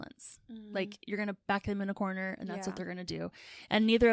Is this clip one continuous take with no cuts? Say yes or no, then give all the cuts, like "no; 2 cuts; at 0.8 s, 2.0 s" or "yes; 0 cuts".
no; 1 cut; at 1.4 s